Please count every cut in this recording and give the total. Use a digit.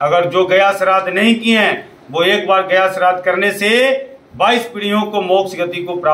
0